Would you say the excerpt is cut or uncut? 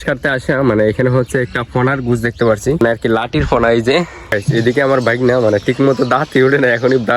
cut